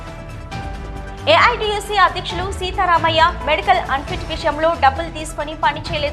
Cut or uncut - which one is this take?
cut